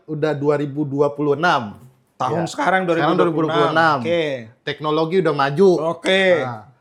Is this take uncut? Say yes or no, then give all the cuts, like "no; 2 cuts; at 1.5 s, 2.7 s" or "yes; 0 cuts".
yes; 0 cuts